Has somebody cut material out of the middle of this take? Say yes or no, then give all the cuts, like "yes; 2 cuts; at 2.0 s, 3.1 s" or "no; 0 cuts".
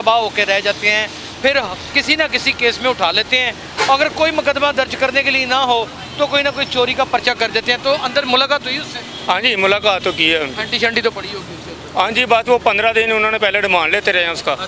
no; 0 cuts